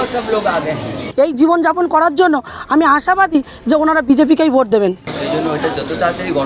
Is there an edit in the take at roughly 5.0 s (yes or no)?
yes